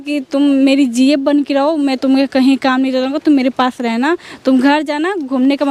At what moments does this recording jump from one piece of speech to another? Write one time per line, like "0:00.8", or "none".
none